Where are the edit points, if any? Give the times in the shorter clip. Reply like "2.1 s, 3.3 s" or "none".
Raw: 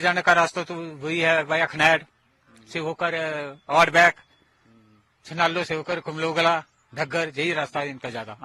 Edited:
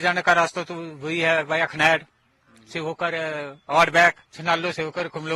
4.3 s